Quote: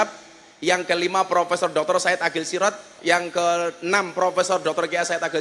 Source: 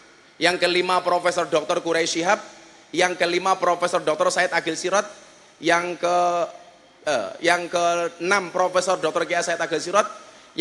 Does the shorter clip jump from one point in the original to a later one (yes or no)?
yes